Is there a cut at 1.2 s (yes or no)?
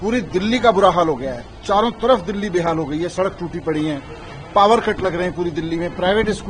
no